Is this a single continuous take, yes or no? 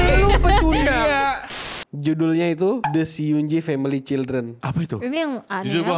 no